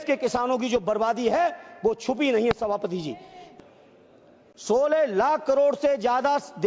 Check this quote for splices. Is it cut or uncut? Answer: cut